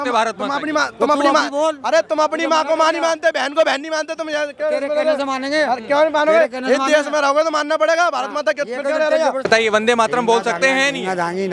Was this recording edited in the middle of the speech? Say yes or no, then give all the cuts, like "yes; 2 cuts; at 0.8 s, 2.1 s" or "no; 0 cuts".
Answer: yes; 1 cut; at 9.5 s